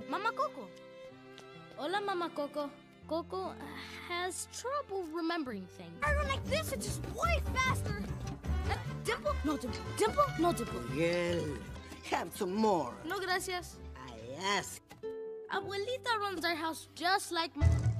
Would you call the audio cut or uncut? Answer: cut